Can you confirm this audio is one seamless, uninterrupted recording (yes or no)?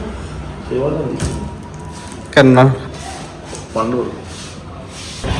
yes